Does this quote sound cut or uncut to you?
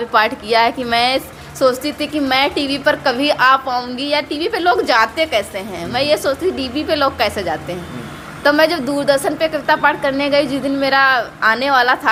uncut